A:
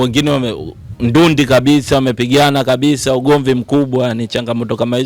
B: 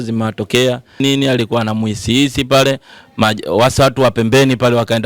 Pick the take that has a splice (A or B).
B